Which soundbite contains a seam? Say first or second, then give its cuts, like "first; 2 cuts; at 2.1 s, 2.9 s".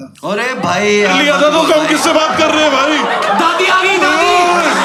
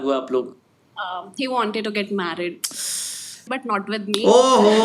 second; 1 cut; at 3.4 s